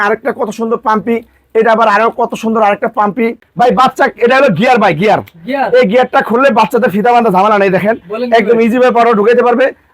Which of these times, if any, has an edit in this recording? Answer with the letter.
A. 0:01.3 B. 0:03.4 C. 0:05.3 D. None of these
B